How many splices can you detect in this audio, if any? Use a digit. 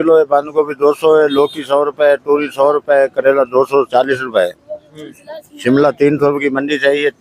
0